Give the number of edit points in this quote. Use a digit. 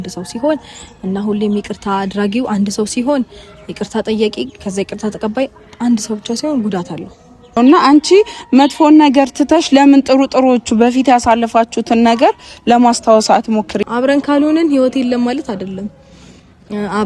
2